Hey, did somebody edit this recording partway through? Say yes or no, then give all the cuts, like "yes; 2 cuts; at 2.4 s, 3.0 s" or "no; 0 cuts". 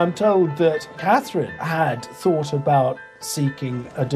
yes; 1 cut; at 1.2 s